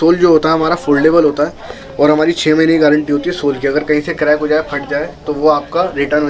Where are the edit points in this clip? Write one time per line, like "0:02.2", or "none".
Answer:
none